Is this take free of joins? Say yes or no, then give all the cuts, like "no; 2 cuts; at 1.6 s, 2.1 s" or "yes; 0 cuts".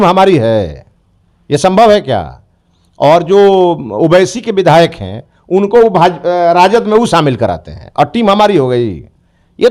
yes; 0 cuts